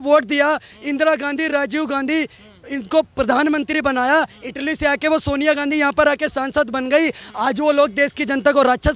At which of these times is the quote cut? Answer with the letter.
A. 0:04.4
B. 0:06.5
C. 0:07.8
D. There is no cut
D